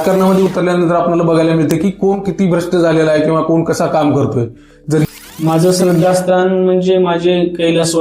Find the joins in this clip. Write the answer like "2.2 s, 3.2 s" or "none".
5.0 s